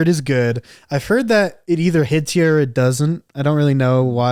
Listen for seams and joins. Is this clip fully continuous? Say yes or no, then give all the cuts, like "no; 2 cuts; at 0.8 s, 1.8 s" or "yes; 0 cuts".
yes; 0 cuts